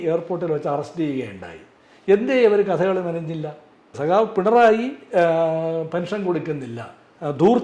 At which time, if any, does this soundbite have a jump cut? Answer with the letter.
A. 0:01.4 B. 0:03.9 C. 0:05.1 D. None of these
B